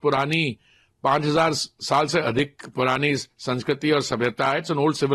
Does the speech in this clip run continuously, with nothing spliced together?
yes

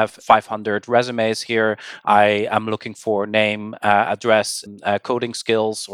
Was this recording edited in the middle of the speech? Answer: no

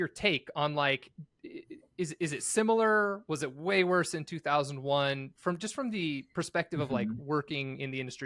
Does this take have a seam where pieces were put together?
no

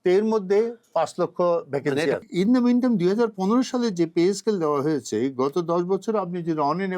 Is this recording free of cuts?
no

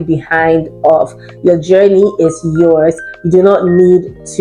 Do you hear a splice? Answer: no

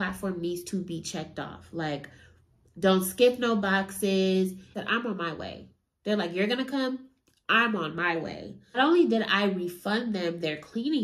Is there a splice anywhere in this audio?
yes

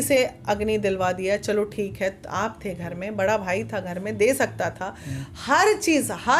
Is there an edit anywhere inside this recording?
no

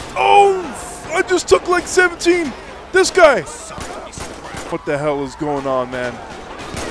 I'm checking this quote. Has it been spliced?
yes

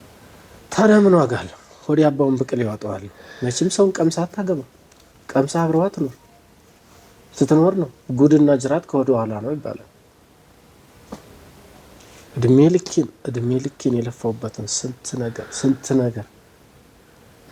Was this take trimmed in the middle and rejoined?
no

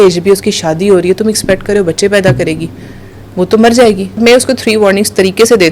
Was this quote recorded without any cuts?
no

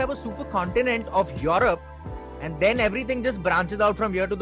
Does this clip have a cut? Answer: no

